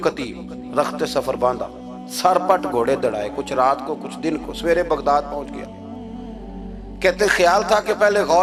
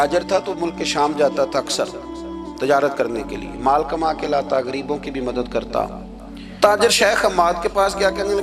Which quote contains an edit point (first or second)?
second